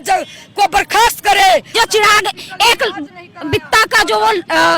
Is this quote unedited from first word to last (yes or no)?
no